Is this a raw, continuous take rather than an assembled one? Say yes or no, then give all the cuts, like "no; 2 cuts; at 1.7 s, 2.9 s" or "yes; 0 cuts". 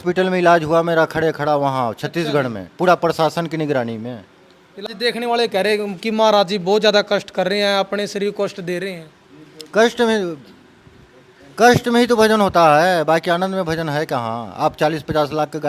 no; 1 cut; at 4.9 s